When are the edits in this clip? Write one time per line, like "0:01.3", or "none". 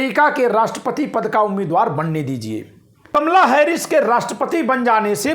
0:03.1